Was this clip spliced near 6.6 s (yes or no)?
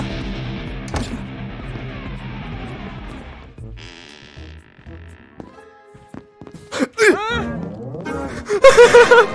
no